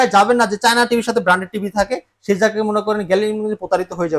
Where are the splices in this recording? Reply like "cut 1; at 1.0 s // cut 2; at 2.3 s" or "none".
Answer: none